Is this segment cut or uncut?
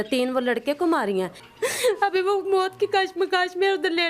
cut